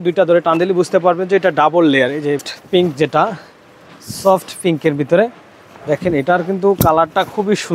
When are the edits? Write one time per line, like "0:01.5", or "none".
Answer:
0:02.4